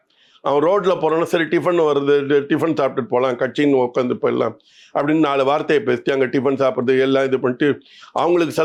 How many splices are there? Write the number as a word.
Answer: zero